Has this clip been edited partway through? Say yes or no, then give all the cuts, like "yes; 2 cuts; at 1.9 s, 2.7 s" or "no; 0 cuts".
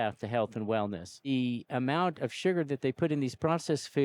yes; 1 cut; at 1.3 s